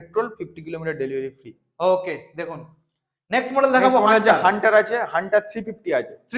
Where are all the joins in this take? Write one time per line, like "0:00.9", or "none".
none